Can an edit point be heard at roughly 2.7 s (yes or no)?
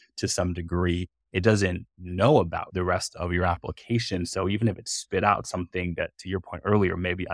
yes